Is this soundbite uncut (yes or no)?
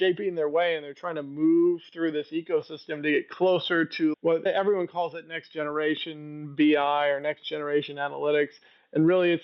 yes